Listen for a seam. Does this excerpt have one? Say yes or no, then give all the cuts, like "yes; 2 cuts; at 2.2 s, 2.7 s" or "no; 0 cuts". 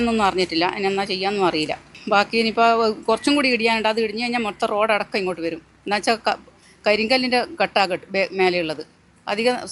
no; 0 cuts